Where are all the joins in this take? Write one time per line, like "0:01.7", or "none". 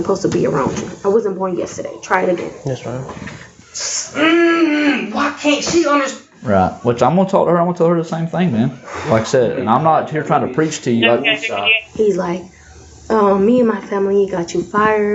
0:03.6
0:11.8